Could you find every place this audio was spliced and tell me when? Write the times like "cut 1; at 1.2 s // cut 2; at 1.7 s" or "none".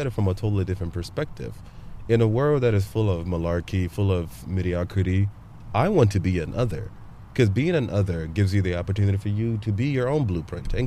none